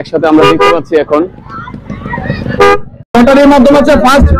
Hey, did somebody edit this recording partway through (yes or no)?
yes